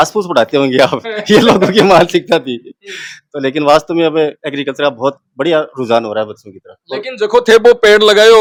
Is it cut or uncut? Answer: uncut